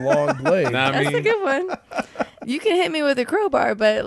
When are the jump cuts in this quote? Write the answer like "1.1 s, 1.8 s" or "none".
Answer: none